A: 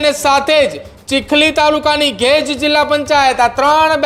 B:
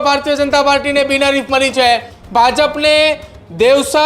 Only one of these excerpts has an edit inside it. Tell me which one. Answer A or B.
B